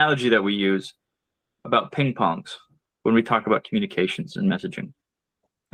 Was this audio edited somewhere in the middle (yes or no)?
no